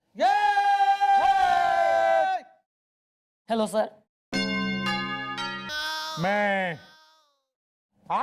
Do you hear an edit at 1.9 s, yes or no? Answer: no